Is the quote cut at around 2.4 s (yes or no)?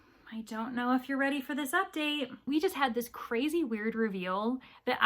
yes